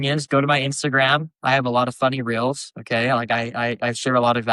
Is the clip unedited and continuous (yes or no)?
yes